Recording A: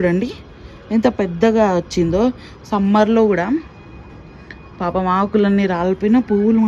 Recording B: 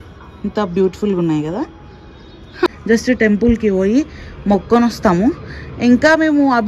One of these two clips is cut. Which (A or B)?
B